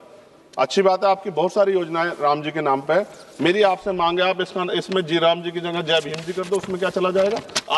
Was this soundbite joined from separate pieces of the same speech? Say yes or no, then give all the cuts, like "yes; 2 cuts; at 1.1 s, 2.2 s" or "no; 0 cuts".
no; 0 cuts